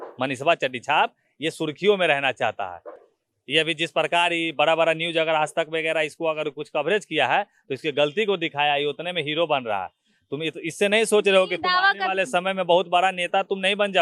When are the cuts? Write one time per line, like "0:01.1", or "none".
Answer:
none